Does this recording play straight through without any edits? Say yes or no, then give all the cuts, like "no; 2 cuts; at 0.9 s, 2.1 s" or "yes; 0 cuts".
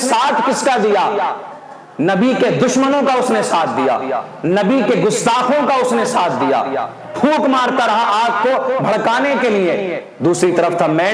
yes; 0 cuts